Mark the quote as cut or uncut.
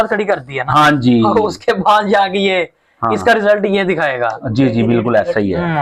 uncut